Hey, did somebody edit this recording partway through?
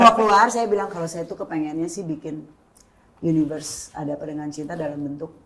no; 0 cuts

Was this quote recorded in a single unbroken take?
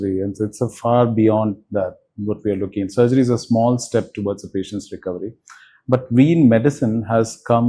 yes; 0 cuts

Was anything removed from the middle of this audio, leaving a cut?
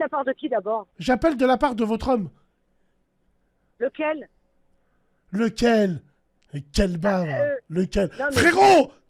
yes; 1 cut; at 0.9 s

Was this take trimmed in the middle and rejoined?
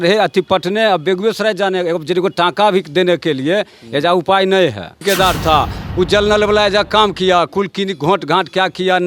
yes; 1 cut; at 5.0 s

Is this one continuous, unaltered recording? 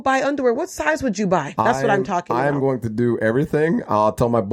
no; 1 cut; at 1.5 s

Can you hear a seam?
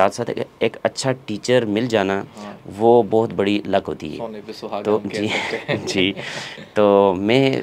no; 0 cuts

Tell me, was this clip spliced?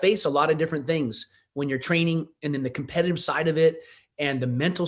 no; 0 cuts

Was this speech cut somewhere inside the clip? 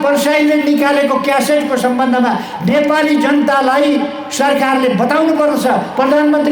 no; 0 cuts

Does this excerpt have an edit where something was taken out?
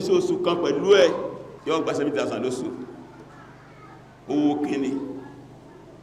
yes; 1 cut; at 1.5 s

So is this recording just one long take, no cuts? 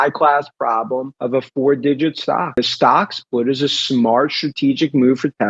no; 2 cuts; at 1.1 s, 2.6 s

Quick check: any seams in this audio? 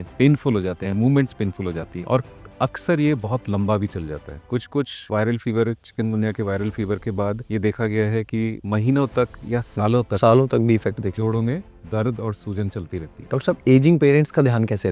yes; 1 cut; at 13.2 s

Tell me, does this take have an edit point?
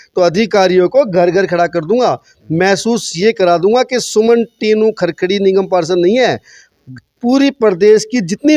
no; 0 cuts

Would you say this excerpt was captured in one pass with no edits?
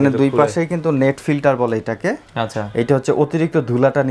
yes; 0 cuts

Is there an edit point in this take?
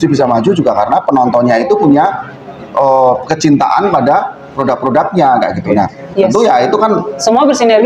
no; 0 cuts

